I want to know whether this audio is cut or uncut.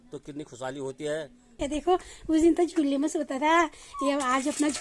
cut